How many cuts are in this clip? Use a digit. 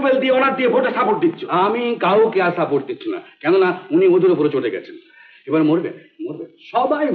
0